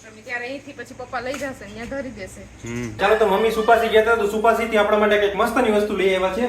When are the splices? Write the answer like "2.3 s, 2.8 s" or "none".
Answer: none